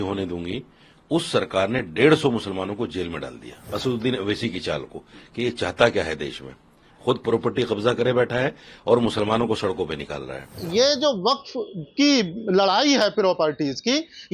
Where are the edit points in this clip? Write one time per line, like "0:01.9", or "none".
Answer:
0:03.7
0:10.6